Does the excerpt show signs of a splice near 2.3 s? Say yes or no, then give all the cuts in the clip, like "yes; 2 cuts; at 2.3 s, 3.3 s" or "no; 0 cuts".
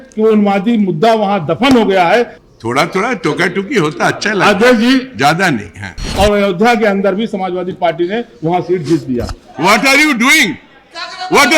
yes; 3 cuts; at 2.3 s, 6.1 s, 9.4 s